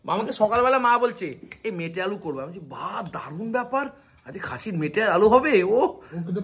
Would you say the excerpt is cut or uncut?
uncut